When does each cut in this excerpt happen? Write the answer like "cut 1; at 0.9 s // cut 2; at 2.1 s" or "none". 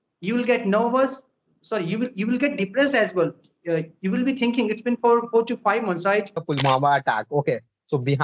cut 1; at 6.4 s